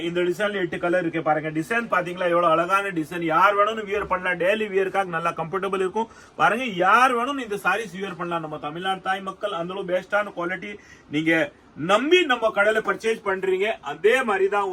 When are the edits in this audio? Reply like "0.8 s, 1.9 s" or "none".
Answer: none